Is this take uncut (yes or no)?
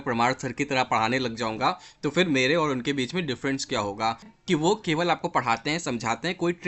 no